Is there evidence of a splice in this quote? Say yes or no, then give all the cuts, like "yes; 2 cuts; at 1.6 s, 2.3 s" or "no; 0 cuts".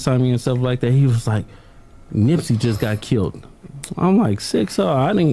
no; 0 cuts